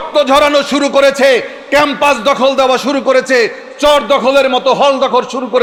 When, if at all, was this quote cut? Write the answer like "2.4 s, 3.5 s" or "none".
none